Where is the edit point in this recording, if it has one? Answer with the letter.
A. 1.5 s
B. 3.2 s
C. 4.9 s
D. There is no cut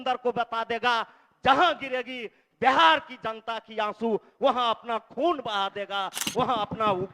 D